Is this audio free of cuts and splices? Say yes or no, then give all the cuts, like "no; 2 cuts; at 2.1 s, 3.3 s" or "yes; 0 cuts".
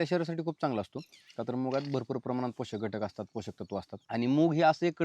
no; 1 cut; at 4.0 s